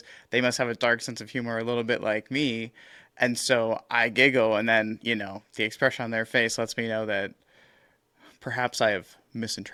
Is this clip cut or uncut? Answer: uncut